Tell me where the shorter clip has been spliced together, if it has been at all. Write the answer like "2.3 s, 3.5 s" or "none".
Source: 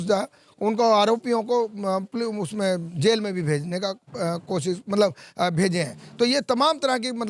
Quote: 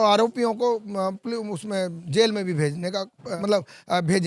3.3 s